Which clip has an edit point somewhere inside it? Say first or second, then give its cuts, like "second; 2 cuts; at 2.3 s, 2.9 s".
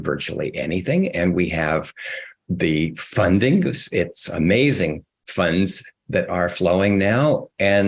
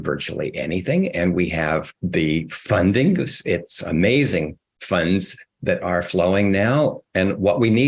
second; 2 cuts; at 2.0 s, 7.0 s